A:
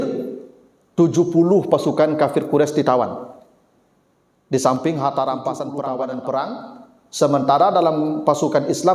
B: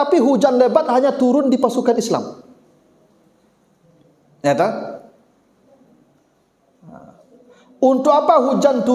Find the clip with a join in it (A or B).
A